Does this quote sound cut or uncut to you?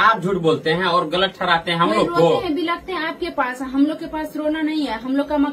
uncut